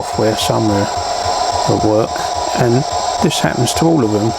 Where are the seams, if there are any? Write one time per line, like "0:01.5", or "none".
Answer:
none